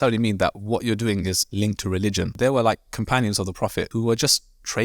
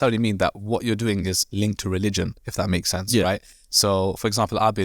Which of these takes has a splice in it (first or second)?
first